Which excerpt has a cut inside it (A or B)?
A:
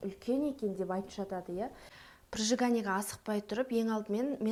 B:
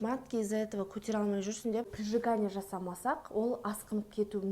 B